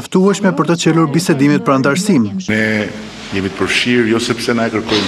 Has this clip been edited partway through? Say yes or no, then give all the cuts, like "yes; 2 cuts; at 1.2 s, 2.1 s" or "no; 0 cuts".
yes; 1 cut; at 2.4 s